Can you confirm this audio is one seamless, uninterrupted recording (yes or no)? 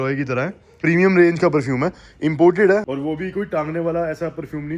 no